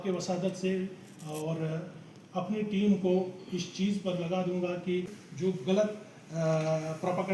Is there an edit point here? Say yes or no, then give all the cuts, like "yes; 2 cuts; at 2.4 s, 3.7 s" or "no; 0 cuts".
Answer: yes; 1 cut; at 5.2 s